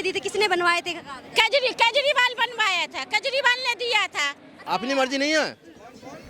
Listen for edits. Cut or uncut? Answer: cut